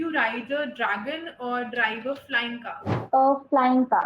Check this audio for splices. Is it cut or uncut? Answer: cut